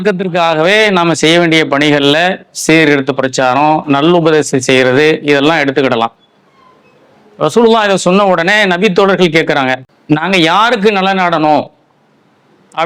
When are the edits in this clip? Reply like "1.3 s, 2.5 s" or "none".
9.9 s